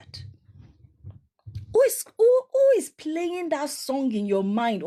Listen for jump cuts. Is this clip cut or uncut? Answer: uncut